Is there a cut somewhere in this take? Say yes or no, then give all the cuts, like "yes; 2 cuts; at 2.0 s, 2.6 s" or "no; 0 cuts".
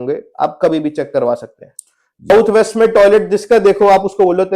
yes; 1 cut; at 2.3 s